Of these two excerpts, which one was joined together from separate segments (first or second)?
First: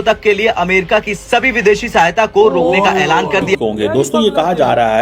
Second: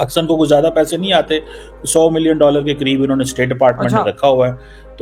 first